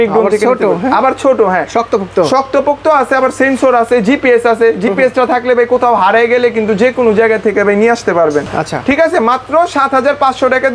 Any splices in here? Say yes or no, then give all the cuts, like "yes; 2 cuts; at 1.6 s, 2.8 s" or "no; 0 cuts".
no; 0 cuts